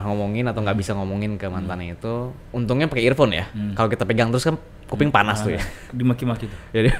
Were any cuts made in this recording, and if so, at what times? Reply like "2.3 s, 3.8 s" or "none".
2.4 s, 5.8 s